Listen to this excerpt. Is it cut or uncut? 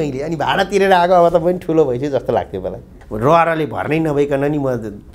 cut